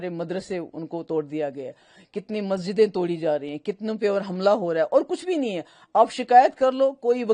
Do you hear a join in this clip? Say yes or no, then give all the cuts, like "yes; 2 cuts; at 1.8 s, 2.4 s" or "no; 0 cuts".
no; 0 cuts